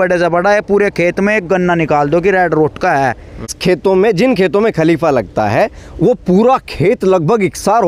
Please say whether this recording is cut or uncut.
cut